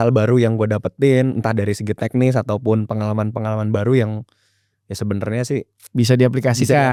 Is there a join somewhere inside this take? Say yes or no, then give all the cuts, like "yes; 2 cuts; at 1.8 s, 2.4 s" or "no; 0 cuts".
no; 0 cuts